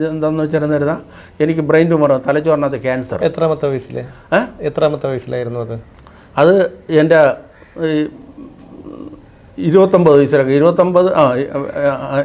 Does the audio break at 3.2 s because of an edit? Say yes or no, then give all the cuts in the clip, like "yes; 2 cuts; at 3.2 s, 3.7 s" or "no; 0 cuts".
no; 0 cuts